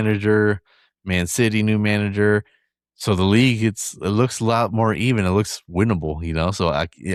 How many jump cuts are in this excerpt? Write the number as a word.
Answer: zero